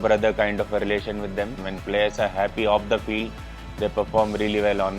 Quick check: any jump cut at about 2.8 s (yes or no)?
no